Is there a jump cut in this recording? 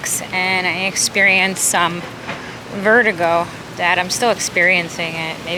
no; 0 cuts

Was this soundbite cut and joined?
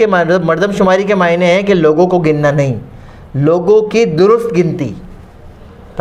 no; 0 cuts

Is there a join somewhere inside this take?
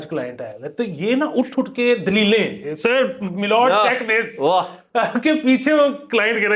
no; 0 cuts

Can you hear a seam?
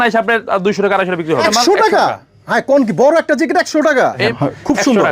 yes; 2 cuts; at 1.4 s, 4.2 s

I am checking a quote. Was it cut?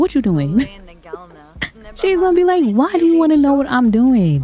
no; 0 cuts

